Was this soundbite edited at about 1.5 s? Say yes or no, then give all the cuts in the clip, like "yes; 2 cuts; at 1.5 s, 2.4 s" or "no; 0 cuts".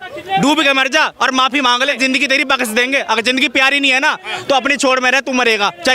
yes; 1 cut; at 1.5 s